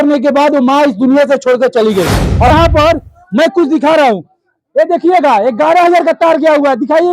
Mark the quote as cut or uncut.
cut